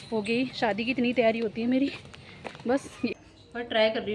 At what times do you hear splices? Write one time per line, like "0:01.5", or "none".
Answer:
0:03.1